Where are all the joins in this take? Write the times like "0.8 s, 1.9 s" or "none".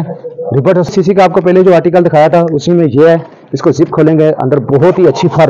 0.9 s